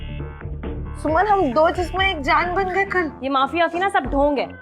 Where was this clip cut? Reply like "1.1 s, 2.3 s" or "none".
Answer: 3.2 s

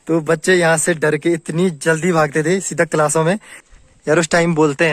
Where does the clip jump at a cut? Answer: 3.6 s

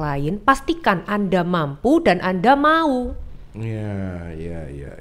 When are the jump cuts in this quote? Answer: none

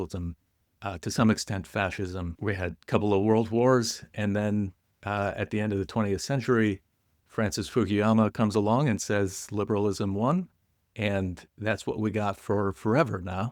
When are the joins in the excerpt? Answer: 2.3 s

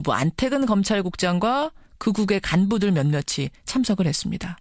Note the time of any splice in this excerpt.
3.2 s

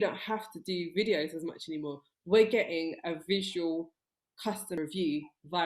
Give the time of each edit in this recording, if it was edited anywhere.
4.8 s

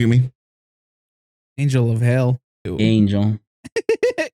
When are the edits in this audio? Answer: 2.7 s

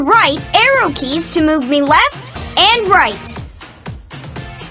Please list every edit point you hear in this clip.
3.2 s

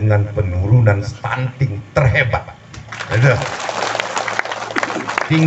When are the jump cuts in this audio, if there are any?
none

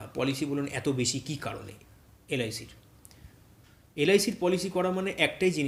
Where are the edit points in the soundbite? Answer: none

